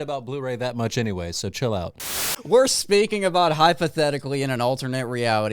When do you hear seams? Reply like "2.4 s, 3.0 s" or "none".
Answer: 2.1 s